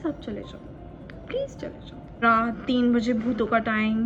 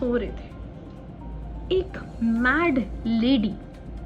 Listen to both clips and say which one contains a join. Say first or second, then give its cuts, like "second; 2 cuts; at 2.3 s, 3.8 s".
first; 1 cut; at 2.2 s